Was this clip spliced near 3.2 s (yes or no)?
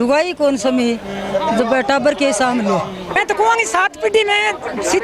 yes